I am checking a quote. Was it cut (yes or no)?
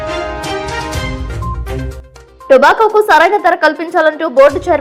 yes